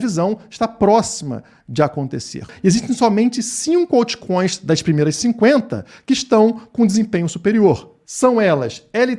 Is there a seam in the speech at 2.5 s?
yes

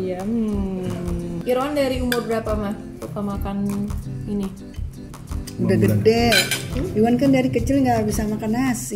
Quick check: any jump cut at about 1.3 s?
yes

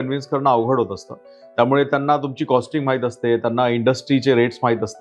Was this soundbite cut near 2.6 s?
no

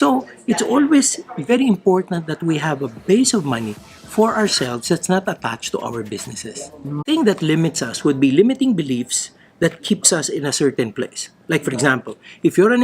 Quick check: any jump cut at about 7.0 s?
yes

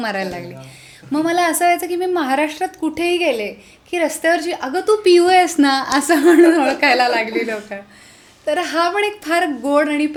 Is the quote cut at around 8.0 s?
no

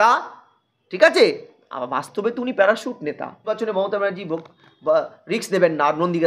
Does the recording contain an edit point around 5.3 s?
no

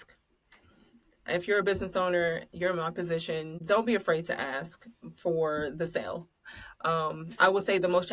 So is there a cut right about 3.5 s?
yes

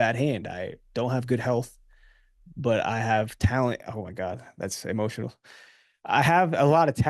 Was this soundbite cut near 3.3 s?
no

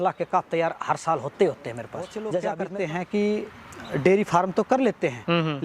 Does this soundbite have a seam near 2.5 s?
yes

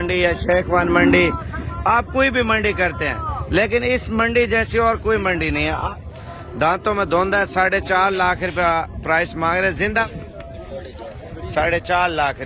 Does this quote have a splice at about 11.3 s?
no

